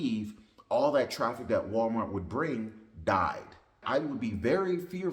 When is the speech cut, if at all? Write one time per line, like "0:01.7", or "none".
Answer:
0:03.8